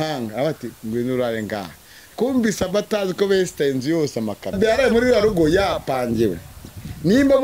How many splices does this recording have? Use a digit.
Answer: 1